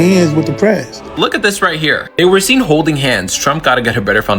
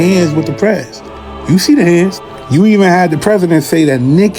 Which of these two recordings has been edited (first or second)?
first